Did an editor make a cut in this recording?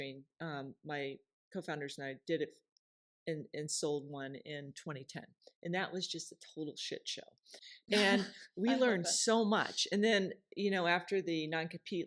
no; 0 cuts

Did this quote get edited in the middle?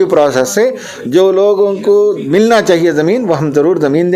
no; 0 cuts

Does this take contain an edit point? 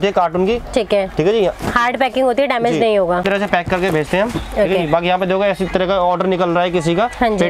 no; 0 cuts

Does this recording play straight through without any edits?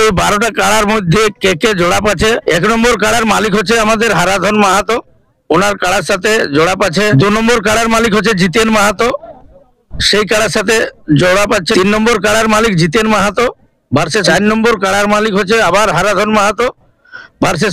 no; 4 cuts; at 2.4 s, 7.1 s, 11.7 s, 14.2 s

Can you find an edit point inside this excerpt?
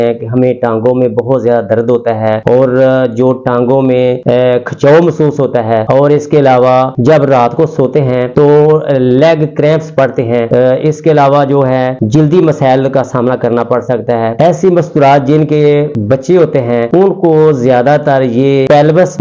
no; 0 cuts

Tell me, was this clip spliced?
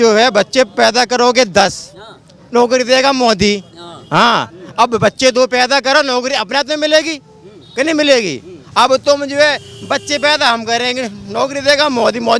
no; 0 cuts

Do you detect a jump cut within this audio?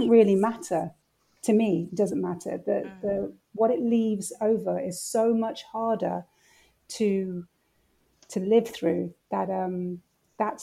no; 0 cuts

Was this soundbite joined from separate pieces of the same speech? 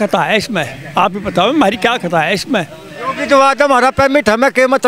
yes; 1 cut; at 3.0 s

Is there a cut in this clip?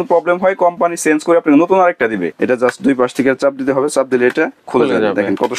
yes; 1 cut; at 2.2 s

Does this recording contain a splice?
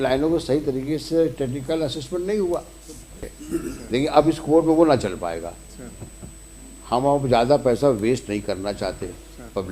yes; 1 cut; at 3.3 s

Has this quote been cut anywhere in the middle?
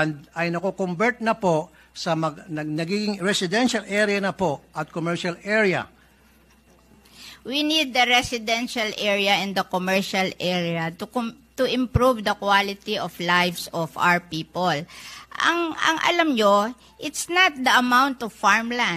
no; 0 cuts

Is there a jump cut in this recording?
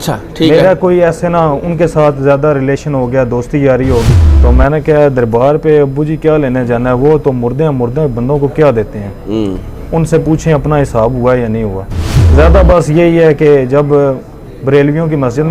yes; 2 cuts; at 4.2 s, 12.2 s

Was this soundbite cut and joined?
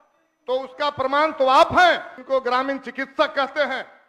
yes; 1 cut; at 2.2 s

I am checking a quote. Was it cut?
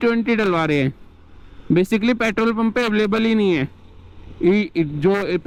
no; 0 cuts

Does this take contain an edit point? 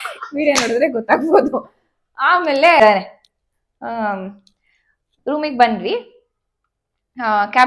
yes; 1 cut; at 2.8 s

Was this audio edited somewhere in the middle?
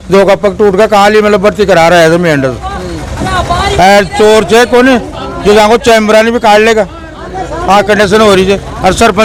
no; 0 cuts

